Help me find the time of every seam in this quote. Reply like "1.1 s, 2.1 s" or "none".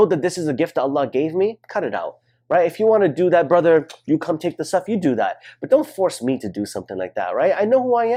none